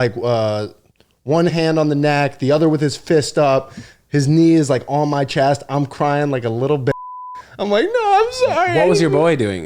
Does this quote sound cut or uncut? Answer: uncut